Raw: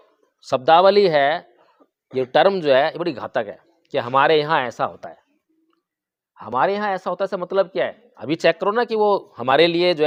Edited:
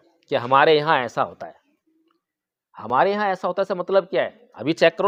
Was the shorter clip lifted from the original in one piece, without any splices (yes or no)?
yes